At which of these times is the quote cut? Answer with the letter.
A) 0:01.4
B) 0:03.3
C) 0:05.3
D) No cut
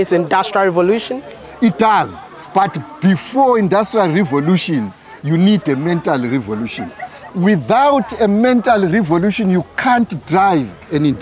A